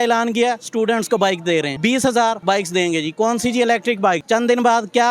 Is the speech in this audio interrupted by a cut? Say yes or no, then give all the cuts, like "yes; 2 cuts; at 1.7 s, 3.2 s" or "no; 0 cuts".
yes; 3 cuts; at 1.7 s, 2.4 s, 4.2 s